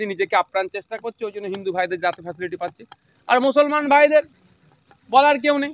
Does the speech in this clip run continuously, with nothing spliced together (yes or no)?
yes